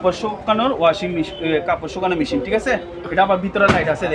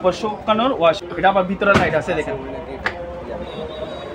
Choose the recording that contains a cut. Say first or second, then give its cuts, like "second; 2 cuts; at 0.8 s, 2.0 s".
second; 1 cut; at 1.0 s